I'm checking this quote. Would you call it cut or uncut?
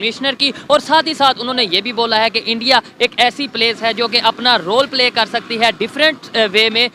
uncut